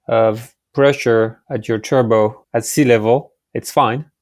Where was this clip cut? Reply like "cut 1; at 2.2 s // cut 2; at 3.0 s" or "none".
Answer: cut 1; at 1.5 s // cut 2; at 2.4 s